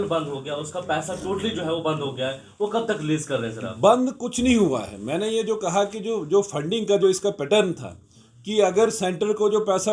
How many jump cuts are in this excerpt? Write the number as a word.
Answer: zero